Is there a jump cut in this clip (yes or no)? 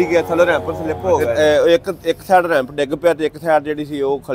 yes